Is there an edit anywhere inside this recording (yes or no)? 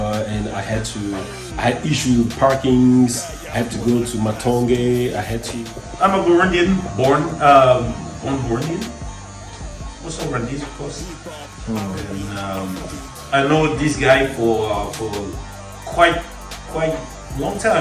yes